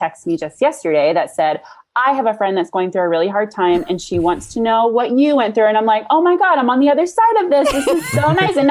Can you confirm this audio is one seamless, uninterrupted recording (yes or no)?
yes